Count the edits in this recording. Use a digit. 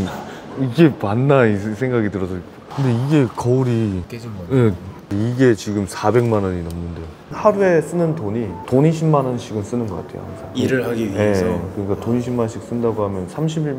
1